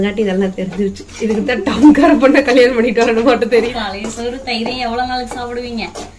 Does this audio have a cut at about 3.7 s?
yes; 1 cut; at 3.7 s

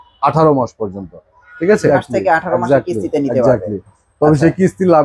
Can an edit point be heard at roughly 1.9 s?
yes; 1 cut; at 1.9 s

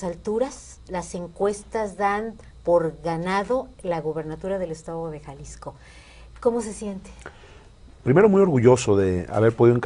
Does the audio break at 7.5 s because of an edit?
no; 1 cut; at 5.9 s

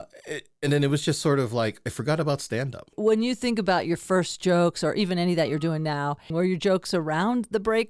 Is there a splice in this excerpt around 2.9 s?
yes; 2 cuts; at 2.9 s, 6.3 s

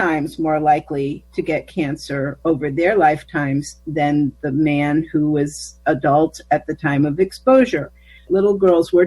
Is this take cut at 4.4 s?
no; 2 cuts; at 1.2 s, 8.1 s

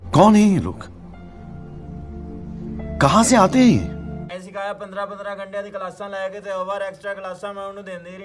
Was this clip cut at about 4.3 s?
yes; 1 cut; at 4.3 s

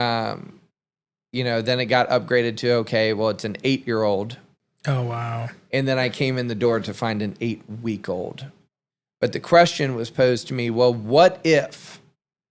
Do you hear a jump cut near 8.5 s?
yes; 1 cut; at 8.5 s

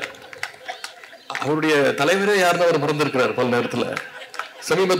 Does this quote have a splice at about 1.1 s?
no; 0 cuts

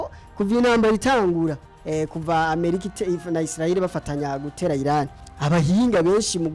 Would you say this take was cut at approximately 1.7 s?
yes; 2 cuts; at 1.7 s, 5.2 s

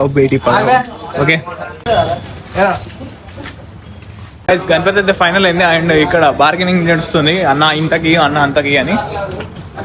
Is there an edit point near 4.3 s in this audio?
yes; 2 cuts; at 1.8 s, 4.3 s

